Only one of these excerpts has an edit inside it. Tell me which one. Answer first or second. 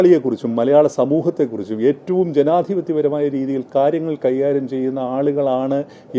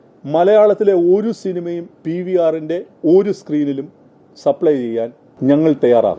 second